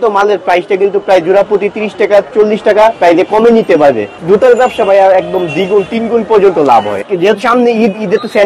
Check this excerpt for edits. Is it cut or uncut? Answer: cut